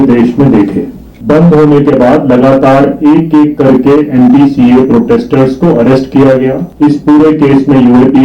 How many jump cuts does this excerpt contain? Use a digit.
2